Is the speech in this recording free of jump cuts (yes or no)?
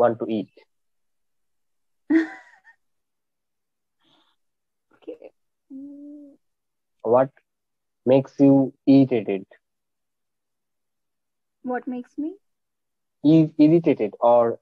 no